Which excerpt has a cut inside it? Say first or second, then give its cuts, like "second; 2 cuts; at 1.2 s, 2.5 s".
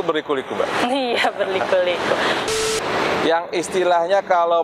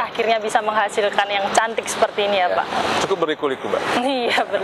first; 1 cut; at 2.5 s